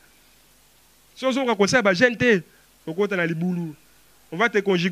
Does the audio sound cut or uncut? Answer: uncut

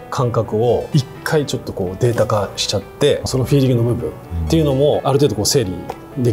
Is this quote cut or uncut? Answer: cut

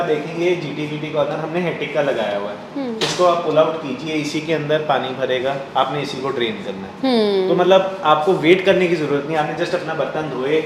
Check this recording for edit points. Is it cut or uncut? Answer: uncut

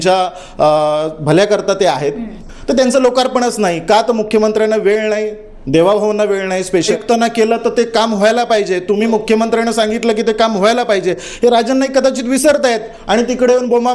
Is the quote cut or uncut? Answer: cut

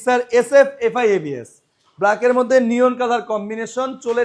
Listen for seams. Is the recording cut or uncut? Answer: uncut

